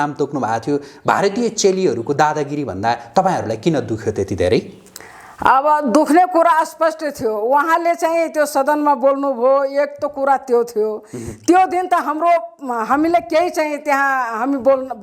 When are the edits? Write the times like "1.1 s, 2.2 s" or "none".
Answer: none